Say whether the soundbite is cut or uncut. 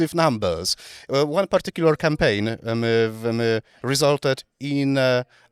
uncut